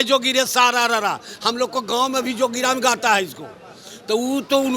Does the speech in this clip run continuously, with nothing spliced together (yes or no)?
yes